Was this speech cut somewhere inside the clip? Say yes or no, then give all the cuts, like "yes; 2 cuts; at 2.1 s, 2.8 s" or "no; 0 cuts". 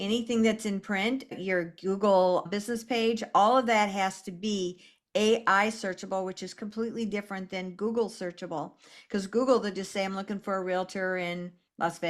yes; 2 cuts; at 1.3 s, 2.5 s